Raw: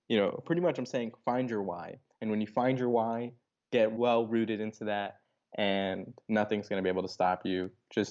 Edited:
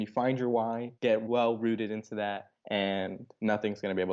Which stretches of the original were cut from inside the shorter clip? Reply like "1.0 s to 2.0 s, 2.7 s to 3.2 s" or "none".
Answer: 3.7 s to 3.9 s, 5.2 s to 5.4 s